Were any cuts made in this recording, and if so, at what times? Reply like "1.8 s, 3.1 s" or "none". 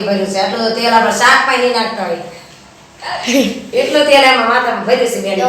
none

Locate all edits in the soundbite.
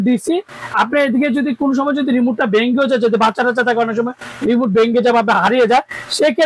none

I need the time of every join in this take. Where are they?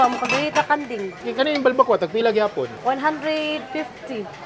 1.2 s, 2.7 s

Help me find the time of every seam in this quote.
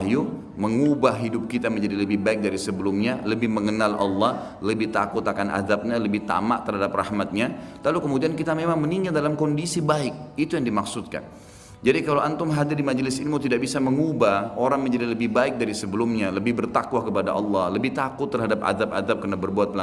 none

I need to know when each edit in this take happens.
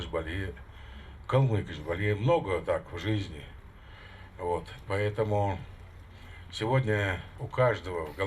7.3 s

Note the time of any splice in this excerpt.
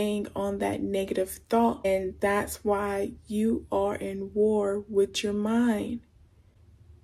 1.8 s

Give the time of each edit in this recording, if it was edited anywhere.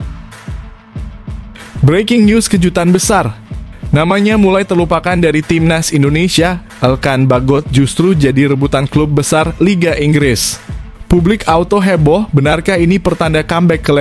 1.8 s

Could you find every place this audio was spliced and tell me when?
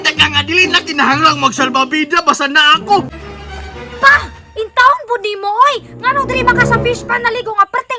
3.2 s

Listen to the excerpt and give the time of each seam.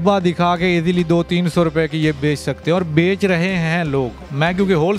none

